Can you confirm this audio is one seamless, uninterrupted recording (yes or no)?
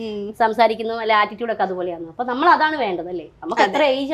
yes